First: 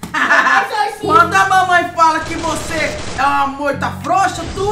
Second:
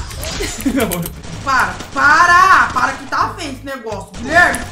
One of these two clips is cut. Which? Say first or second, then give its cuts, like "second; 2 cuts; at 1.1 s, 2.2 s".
second; 1 cut; at 1.2 s